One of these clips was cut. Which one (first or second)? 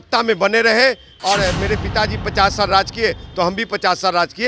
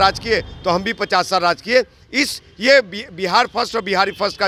first